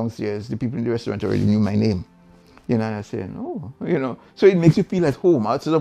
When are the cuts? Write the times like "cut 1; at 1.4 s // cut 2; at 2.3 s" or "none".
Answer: none